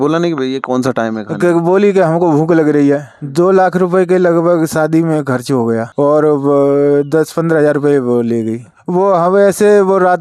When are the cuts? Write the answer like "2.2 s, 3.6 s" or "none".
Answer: 3.1 s, 8.7 s

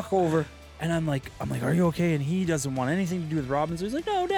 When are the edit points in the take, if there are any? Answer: none

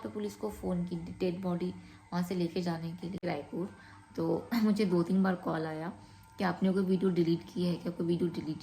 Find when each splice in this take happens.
3.2 s

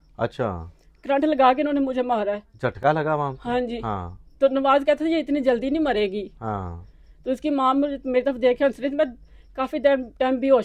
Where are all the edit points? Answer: none

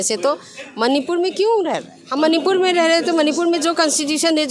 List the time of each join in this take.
1.9 s

